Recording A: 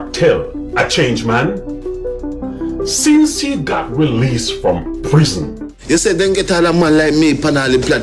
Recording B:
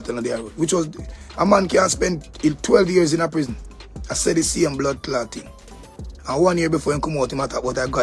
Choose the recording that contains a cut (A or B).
A